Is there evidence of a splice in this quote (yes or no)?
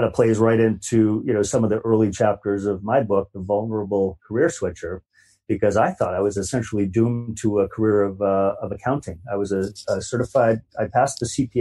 no